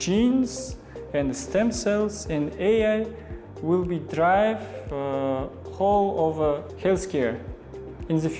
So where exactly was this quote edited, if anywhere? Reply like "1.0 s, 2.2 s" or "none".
none